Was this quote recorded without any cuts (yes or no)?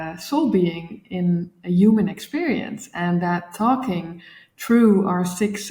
yes